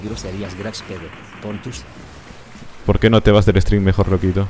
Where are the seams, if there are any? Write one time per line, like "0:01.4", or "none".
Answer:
none